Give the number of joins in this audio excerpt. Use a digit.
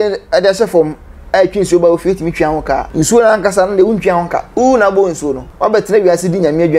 3